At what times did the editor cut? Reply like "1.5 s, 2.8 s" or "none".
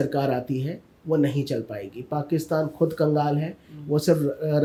none